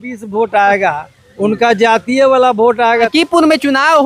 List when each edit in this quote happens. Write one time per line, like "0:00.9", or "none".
0:03.1